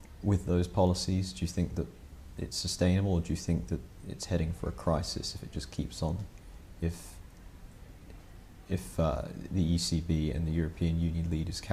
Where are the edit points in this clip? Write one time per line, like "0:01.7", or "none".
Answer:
none